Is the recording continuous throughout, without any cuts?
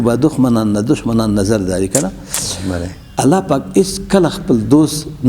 yes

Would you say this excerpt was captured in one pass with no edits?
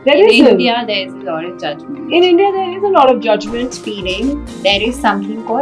no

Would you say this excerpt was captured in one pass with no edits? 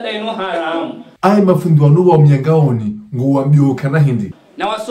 no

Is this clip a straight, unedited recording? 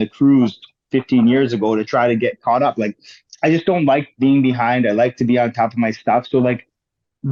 yes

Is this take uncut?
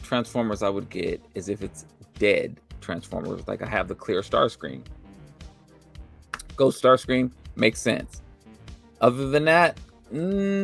yes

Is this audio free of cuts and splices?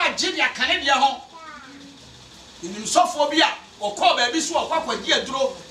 yes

